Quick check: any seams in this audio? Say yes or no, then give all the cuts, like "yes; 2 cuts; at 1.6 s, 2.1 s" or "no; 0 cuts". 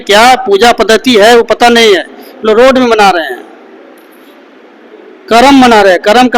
no; 0 cuts